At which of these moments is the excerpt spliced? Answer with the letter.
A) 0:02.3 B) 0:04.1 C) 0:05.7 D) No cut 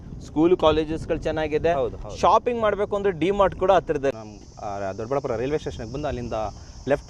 B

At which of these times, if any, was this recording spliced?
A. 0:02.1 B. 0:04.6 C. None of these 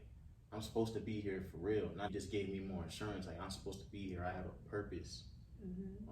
A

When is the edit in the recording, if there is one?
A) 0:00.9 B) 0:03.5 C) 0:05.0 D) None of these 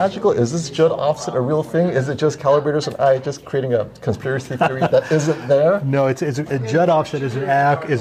D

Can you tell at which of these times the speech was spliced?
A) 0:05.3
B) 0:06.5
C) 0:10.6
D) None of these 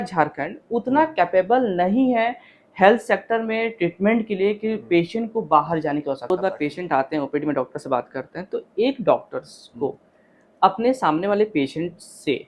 B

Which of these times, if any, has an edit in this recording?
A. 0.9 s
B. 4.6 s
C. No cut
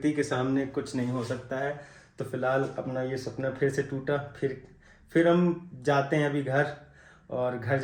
C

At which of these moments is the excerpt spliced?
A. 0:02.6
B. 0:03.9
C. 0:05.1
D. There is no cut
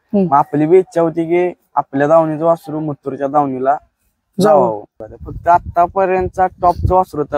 C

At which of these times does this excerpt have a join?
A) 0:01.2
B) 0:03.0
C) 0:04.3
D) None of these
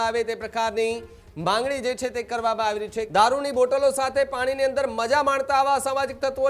B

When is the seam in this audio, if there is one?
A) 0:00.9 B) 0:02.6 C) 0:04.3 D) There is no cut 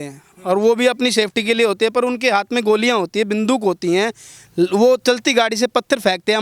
D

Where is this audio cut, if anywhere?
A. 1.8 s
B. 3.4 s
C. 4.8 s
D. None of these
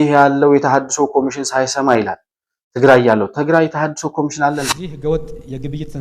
C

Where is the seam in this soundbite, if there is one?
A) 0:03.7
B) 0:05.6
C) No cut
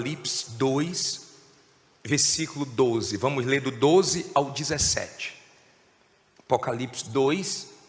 A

